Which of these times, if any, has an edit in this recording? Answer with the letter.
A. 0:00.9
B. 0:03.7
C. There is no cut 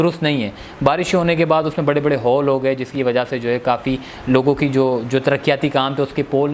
C